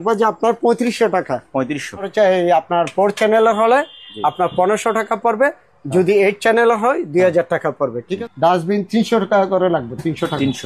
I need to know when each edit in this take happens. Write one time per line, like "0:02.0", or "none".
0:02.1
0:08.1

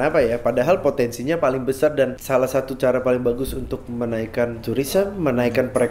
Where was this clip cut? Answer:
0:02.2
0:04.6

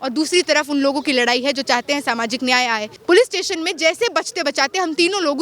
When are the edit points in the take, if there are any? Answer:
0:02.9

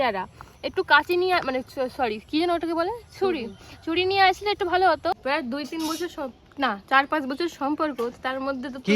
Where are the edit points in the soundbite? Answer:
0:05.2
0:06.6

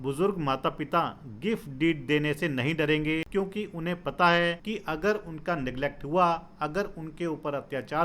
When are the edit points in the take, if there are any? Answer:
0:03.3
0:04.6

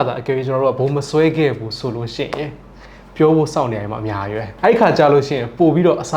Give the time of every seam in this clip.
0:04.5

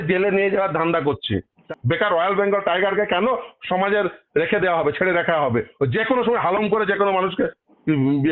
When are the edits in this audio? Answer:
0:01.3

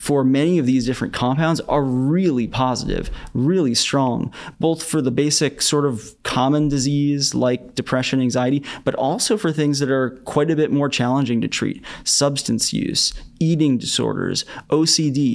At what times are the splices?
none

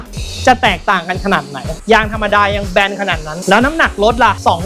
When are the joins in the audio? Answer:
0:01.7

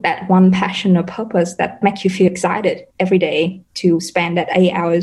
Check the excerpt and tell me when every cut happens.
0:01.8

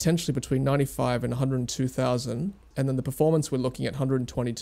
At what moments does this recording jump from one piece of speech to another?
0:02.6

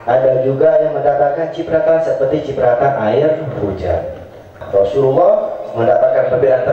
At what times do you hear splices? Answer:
0:04.6

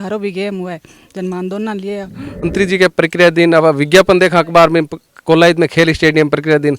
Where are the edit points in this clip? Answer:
0:02.5

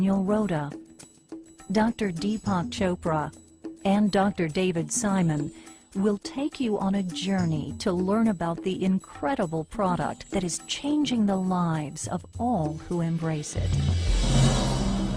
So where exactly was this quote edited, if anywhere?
0:14.1

